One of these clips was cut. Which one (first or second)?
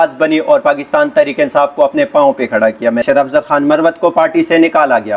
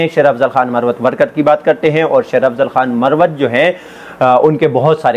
first